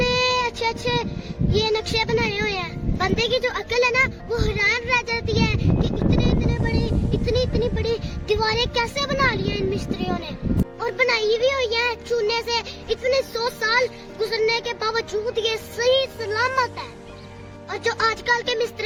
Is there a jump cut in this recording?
no; 0 cuts

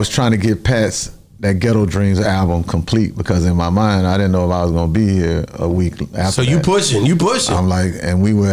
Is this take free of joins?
yes; 0 cuts

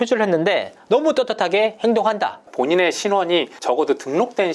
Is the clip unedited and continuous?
no; 1 cut; at 2.4 s

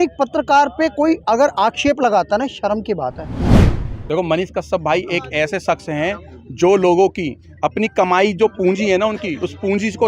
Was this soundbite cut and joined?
yes; 1 cut; at 3.6 s

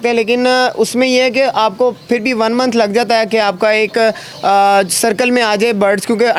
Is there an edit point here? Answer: no; 0 cuts

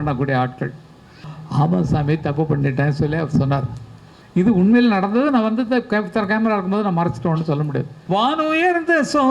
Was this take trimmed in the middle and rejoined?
yes; 2 cuts; at 1.3 s, 7.9 s

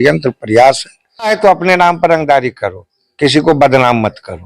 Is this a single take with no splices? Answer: no; 1 cut; at 1.3 s

